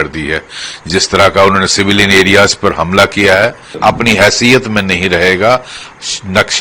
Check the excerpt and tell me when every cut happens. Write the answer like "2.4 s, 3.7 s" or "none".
3.7 s